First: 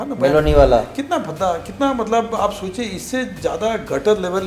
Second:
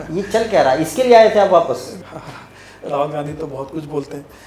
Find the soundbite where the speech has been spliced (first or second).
second